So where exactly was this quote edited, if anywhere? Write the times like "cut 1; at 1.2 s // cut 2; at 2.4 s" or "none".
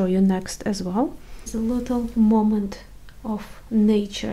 cut 1; at 1.4 s